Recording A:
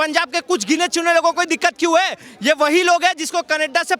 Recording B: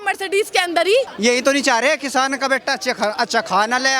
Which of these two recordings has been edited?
B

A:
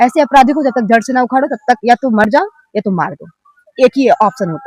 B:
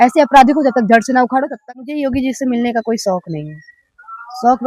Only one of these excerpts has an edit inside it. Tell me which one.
B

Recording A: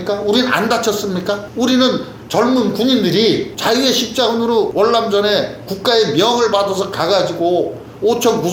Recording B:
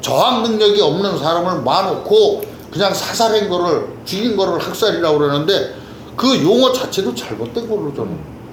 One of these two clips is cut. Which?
A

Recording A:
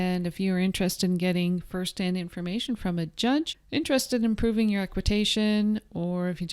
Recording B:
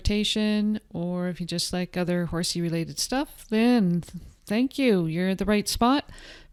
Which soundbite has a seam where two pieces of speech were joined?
A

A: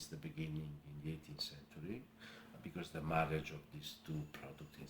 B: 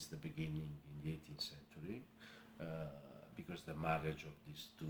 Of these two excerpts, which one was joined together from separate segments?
A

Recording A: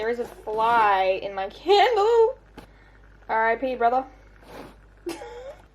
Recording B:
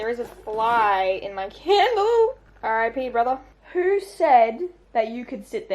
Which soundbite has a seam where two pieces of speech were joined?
B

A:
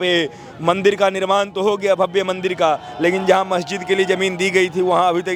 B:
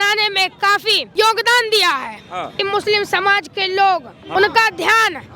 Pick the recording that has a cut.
B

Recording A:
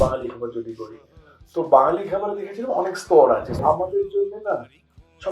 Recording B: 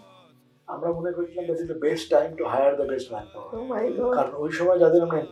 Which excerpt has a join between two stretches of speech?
A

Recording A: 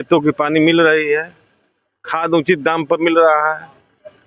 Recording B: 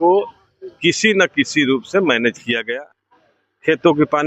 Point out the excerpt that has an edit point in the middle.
B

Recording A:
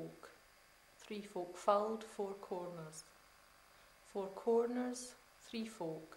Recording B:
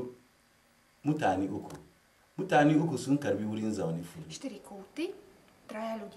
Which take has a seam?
B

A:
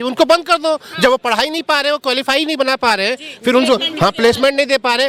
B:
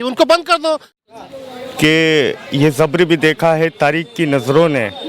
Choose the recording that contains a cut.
B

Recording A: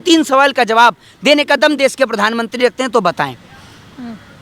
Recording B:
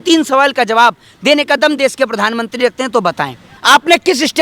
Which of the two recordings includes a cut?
B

